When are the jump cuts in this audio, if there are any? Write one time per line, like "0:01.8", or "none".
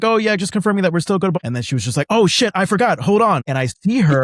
0:01.4
0:03.4